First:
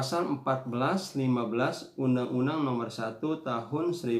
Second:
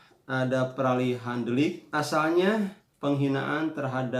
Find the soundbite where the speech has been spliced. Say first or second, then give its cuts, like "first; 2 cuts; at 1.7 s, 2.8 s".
second; 2 cuts; at 1.8 s, 2.8 s